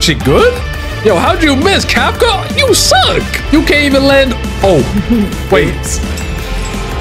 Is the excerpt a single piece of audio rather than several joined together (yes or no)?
yes